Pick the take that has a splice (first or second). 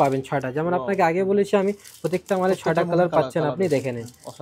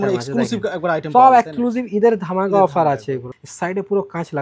second